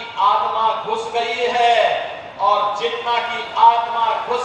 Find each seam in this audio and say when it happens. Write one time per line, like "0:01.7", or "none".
none